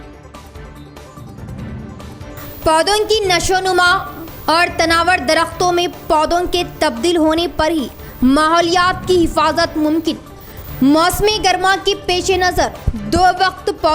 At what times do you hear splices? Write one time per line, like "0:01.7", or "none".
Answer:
0:02.3